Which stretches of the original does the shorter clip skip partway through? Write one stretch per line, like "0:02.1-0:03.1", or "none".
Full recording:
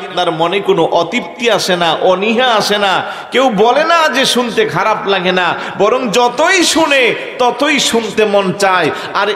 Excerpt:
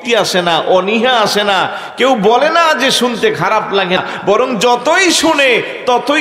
0:05.3-0:05.5